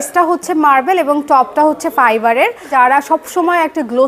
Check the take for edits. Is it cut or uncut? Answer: cut